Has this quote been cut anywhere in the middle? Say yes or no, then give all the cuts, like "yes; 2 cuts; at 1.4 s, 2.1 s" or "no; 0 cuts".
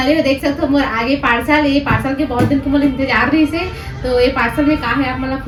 no; 0 cuts